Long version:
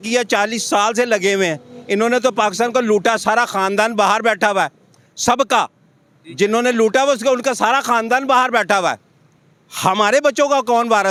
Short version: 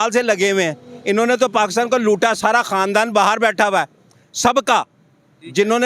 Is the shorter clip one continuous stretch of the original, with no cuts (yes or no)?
yes